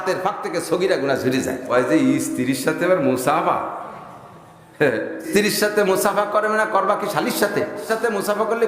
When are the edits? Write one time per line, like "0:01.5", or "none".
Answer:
0:01.6
0:05.3
0:07.8